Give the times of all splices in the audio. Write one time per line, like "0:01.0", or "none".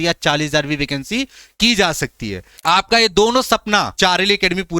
0:02.5